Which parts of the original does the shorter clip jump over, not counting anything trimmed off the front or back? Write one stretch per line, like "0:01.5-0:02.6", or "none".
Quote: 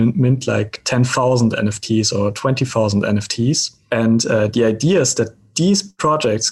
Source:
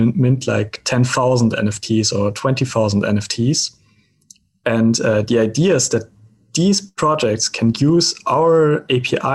0:03.7-0:04.5
0:06.2-0:06.4